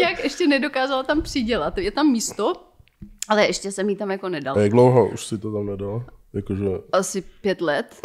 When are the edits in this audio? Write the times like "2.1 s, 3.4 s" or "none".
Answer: none